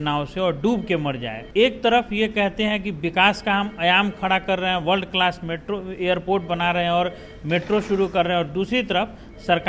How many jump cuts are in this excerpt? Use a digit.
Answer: 1